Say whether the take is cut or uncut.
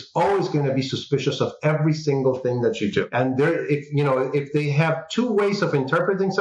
uncut